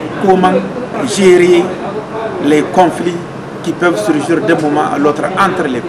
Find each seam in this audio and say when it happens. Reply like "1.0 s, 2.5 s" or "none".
0.9 s